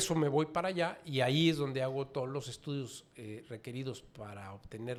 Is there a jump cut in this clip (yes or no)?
no